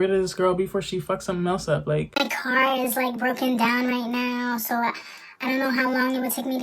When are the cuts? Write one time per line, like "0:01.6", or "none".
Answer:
0:02.1

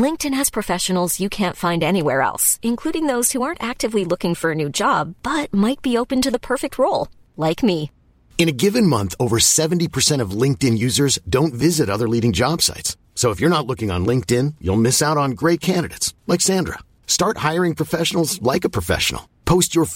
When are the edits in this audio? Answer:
none

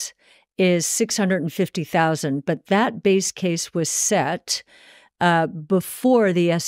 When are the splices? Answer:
none

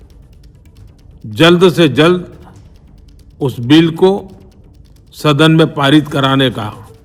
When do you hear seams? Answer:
none

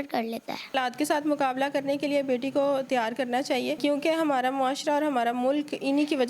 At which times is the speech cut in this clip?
0:00.7
0:03.8

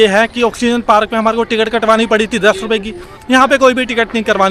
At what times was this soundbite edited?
none

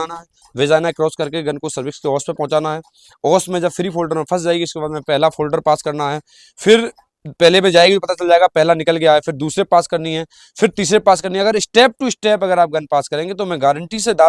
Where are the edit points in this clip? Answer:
none

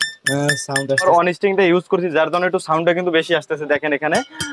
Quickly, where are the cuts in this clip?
0:01.0

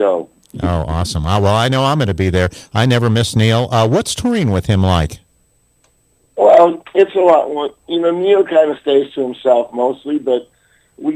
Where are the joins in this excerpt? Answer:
0:01.5

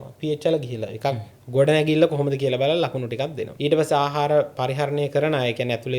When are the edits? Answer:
0:03.4

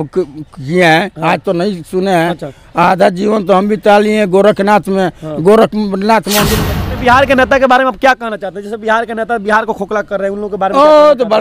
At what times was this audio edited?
0:06.7

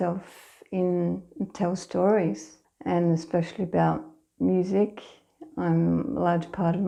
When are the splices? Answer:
none

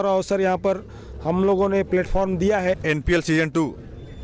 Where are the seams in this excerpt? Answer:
0:02.8

